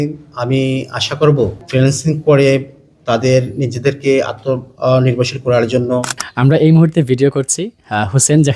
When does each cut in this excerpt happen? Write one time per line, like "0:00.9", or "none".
0:01.6
0:06.3